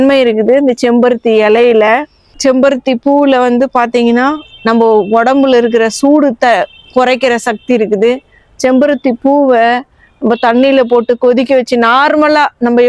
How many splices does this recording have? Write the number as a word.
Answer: one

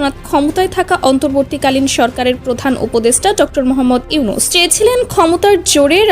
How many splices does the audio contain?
one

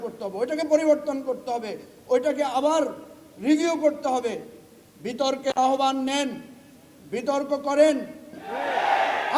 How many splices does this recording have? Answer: one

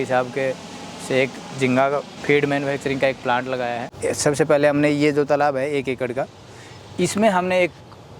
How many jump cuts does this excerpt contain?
two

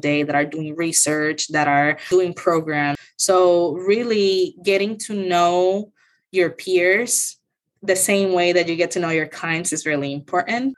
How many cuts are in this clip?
two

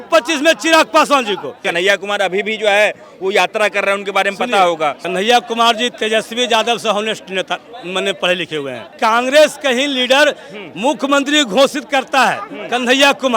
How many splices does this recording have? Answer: three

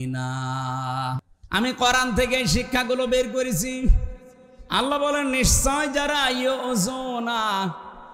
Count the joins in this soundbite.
one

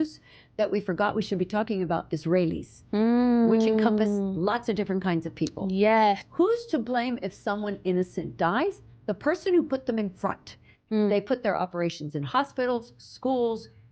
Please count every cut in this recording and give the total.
one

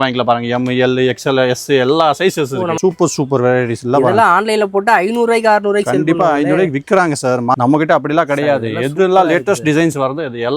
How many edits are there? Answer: two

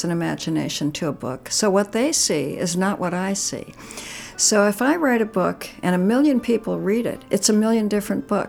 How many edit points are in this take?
one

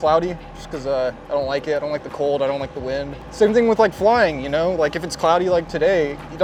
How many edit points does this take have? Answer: zero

